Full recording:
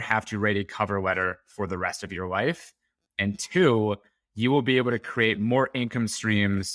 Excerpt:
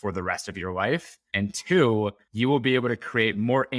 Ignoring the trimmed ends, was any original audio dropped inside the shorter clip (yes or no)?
yes